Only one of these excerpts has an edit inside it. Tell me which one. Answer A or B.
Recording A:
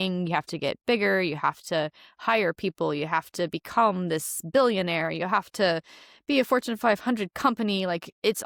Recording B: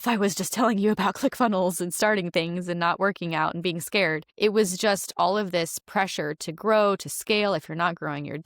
B